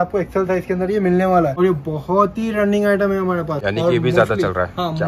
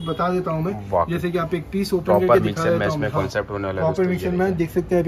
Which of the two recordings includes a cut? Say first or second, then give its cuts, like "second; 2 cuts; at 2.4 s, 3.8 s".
first; 2 cuts; at 1.5 s, 3.6 s